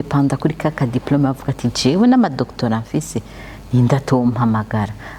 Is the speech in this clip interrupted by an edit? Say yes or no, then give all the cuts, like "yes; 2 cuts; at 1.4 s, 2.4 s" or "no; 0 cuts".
no; 0 cuts